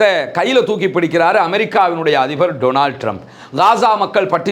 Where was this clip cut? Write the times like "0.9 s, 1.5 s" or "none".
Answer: none